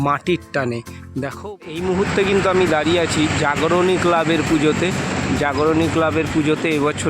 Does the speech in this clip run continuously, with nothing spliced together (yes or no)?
no